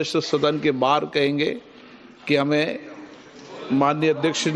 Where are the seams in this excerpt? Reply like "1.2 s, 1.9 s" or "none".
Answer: none